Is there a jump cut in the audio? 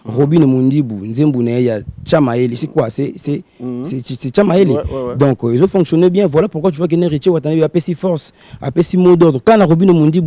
no; 0 cuts

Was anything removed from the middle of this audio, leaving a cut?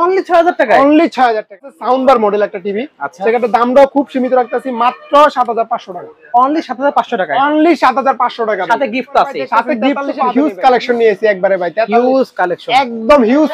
yes; 2 cuts; at 1.7 s, 10.1 s

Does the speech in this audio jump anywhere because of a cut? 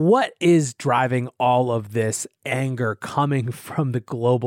no; 0 cuts

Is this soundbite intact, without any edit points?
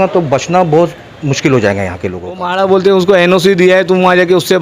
no; 1 cut; at 2.5 s

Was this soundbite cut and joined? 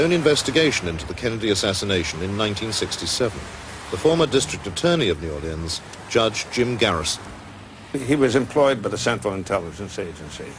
no; 0 cuts

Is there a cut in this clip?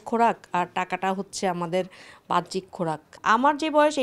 yes; 1 cut; at 3.1 s

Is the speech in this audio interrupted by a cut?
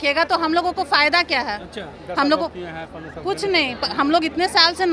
no; 0 cuts

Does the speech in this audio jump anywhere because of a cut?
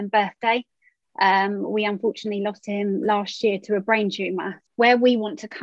yes; 1 cut; at 4.6 s

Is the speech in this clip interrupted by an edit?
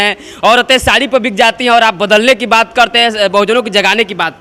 no; 0 cuts

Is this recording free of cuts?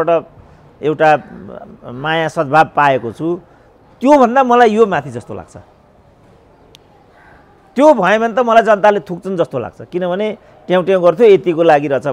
yes; 0 cuts

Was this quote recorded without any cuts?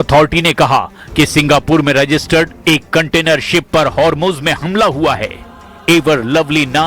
no; 1 cut; at 1.9 s

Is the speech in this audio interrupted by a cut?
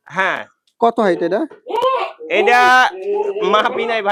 no; 0 cuts

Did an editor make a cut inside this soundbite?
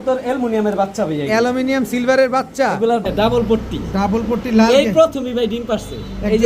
yes; 1 cut; at 3.1 s

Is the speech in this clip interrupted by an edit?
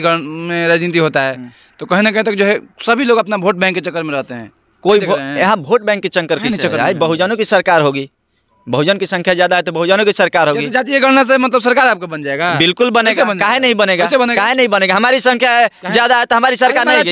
no; 0 cuts

